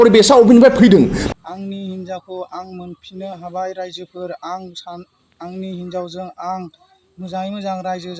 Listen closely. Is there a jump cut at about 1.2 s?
yes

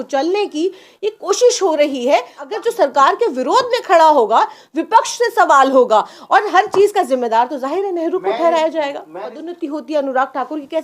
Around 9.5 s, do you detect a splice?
yes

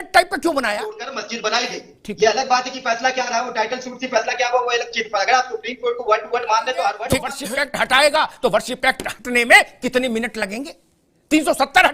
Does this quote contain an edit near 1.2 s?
yes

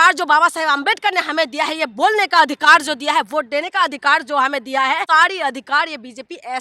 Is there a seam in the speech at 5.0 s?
yes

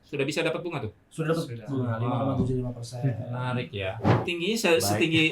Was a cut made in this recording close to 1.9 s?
no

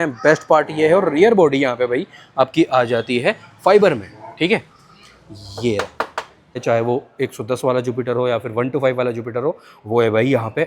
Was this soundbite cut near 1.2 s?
no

